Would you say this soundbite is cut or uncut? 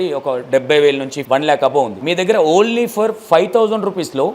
cut